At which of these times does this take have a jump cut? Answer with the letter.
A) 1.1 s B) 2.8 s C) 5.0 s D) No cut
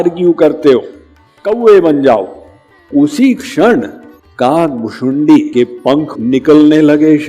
B